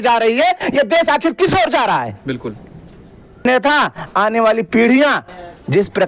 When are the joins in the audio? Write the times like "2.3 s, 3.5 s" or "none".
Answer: 3.4 s